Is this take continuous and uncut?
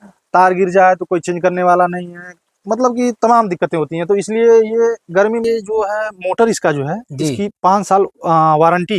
no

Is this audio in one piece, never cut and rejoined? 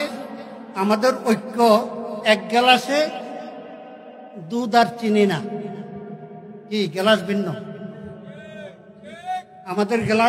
yes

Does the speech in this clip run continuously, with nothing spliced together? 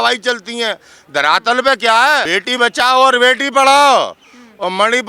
no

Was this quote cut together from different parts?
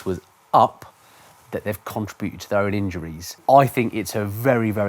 yes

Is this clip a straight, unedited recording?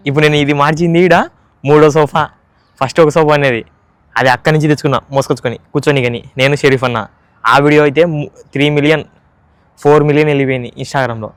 yes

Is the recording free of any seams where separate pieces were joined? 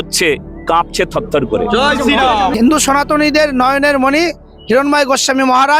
no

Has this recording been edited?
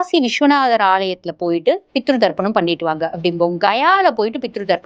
no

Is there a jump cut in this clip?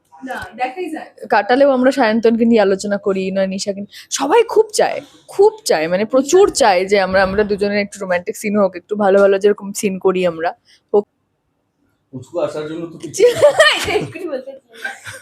yes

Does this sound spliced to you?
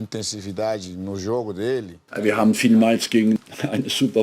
yes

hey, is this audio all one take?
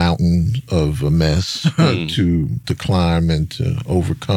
no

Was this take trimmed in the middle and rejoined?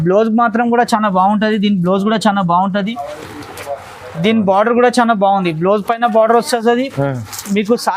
no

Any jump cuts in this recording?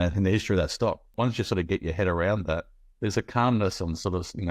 yes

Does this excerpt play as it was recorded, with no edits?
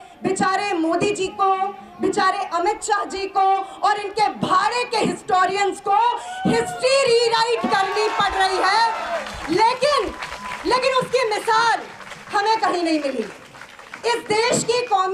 yes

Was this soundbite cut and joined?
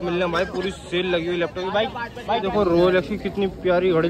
yes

